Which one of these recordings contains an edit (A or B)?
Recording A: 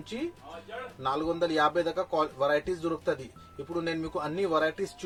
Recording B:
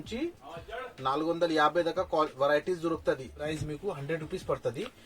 B